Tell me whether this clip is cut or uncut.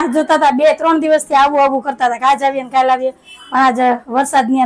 uncut